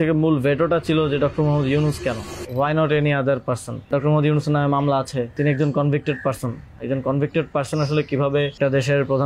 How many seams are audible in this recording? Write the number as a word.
four